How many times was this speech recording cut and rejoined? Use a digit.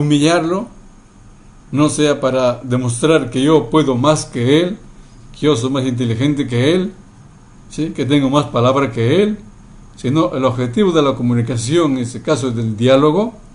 0